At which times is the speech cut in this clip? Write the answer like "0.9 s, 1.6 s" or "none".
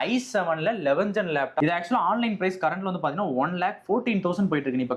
1.5 s